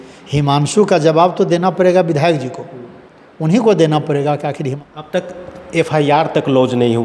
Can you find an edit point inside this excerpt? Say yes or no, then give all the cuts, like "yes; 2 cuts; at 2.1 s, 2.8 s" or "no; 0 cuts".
yes; 1 cut; at 4.7 s